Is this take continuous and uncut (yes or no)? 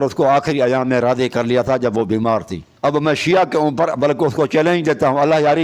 no